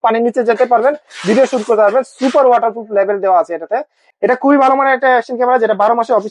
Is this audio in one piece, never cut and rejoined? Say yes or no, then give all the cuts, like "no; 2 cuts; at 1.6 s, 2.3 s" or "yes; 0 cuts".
no; 1 cut; at 4.0 s